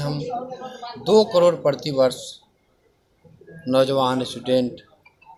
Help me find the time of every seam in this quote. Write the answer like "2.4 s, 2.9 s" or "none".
none